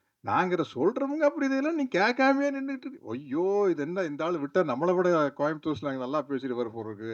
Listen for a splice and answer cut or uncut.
uncut